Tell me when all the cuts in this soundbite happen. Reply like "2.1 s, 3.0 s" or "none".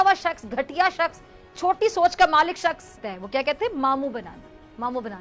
3.0 s